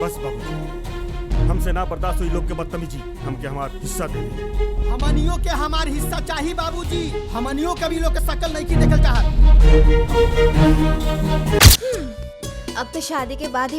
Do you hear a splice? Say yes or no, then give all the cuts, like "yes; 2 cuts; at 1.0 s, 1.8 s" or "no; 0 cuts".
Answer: yes; 1 cut; at 11.6 s